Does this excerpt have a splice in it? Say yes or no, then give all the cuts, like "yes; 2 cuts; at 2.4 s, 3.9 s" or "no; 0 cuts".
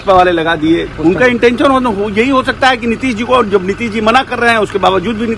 yes; 1 cut; at 0.9 s